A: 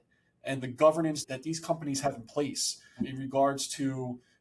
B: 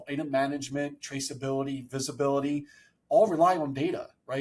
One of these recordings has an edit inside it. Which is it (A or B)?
A